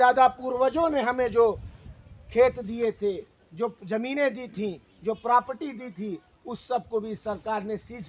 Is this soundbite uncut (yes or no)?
yes